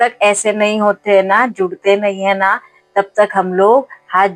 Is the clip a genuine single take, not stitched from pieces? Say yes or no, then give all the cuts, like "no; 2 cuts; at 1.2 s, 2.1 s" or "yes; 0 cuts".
yes; 0 cuts